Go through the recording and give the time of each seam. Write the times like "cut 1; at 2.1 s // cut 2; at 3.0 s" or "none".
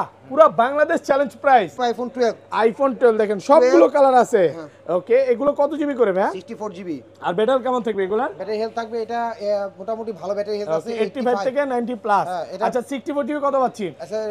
cut 1; at 1.7 s